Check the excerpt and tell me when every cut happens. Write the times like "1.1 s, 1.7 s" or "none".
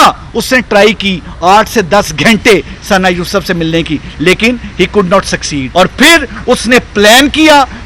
5.6 s